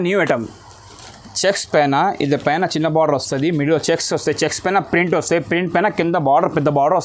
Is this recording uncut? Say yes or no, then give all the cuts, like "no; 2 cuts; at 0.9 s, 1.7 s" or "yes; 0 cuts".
yes; 0 cuts